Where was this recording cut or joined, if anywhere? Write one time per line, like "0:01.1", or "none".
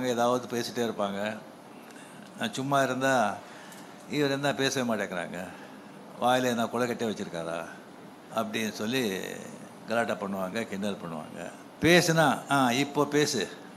0:11.6